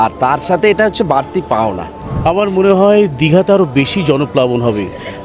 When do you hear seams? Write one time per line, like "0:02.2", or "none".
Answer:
0:02.1